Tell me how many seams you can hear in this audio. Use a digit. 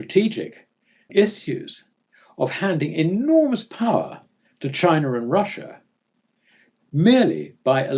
1